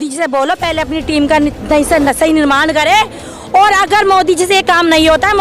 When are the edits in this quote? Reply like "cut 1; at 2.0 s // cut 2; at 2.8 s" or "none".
none